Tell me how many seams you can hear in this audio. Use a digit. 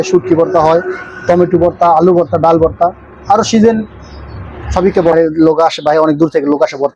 1